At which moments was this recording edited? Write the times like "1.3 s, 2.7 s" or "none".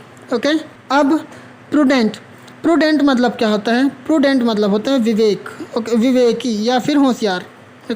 1.0 s